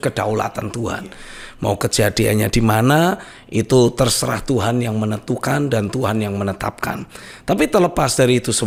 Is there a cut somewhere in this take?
no; 0 cuts

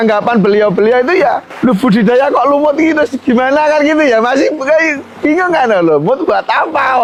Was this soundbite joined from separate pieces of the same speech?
no; 0 cuts

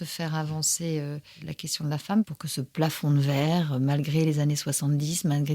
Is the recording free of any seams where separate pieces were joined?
no; 2 cuts; at 1.4 s, 2.2 s

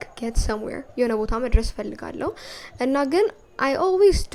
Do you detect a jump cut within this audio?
no; 0 cuts

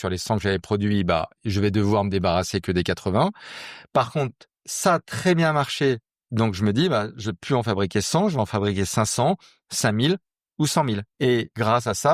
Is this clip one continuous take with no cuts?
no; 1 cut; at 11.1 s

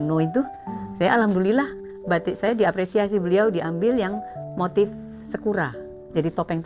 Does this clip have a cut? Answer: no; 0 cuts

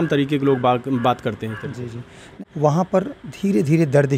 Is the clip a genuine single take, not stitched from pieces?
no; 1 cut; at 2.3 s

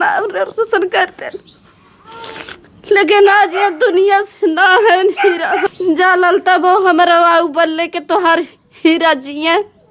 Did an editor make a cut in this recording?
yes; 1 cut; at 5.7 s

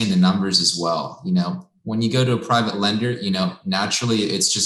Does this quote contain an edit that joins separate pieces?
no; 0 cuts

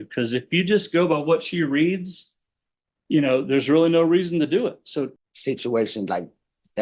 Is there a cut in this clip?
yes; 1 cut; at 5.2 s

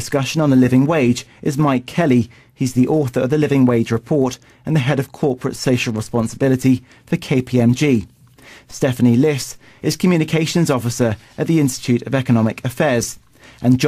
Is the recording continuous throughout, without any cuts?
yes; 0 cuts

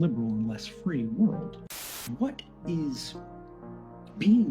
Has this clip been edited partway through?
yes; 1 cut; at 2.0 s

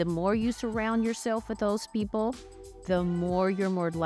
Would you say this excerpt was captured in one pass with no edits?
yes; 0 cuts

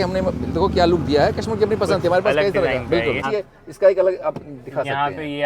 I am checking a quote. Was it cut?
yes; 1 cut; at 3.2 s

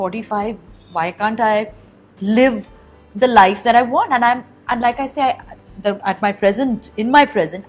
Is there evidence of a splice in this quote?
no; 0 cuts

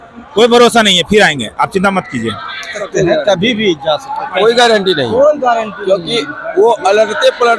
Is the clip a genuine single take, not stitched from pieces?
no; 1 cut; at 2.8 s

